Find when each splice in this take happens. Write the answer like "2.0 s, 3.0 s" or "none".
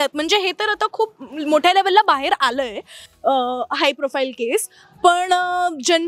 none